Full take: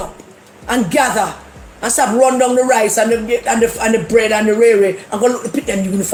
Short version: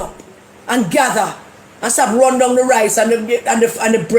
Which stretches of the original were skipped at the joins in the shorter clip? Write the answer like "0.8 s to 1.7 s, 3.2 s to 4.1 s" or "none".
none